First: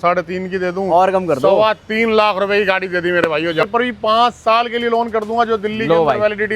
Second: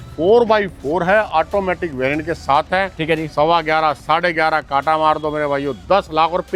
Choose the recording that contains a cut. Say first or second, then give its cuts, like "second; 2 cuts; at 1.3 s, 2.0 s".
first; 1 cut; at 3.6 s